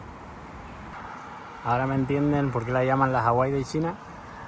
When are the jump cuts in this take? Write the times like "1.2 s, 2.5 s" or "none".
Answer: 0.9 s